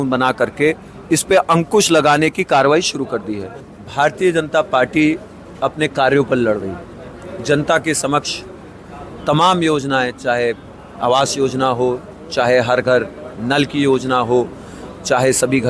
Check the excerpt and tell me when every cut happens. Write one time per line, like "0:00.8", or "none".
0:03.7